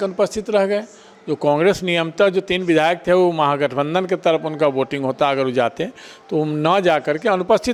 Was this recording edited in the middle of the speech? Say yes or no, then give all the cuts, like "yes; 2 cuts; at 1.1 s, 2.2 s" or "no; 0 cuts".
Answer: no; 0 cuts